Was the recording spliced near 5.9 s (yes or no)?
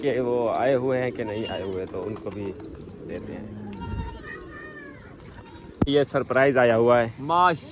yes